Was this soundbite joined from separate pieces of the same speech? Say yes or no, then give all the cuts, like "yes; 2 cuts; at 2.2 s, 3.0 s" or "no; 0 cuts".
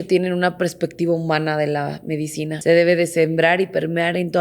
yes; 1 cut; at 2.5 s